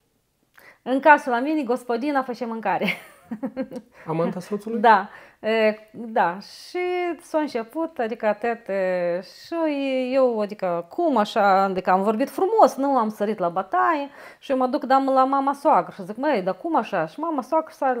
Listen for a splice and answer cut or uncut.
uncut